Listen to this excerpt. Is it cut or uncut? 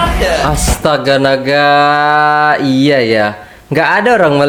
uncut